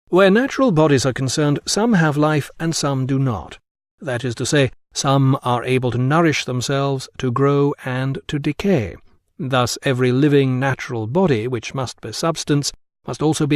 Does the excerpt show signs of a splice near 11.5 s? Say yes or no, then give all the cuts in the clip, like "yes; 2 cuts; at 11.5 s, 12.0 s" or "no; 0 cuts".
no; 1 cut; at 3.5 s